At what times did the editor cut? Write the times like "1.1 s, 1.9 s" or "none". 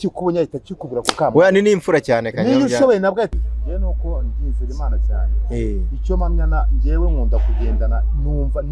3.3 s